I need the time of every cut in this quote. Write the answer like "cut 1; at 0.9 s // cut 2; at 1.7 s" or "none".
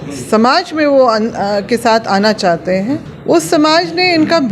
cut 1; at 3.1 s